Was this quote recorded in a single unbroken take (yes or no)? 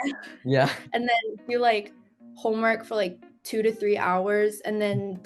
yes